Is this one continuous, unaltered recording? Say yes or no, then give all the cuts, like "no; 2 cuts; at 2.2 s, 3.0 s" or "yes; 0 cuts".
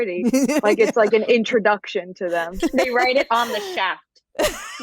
no; 1 cut; at 2.7 s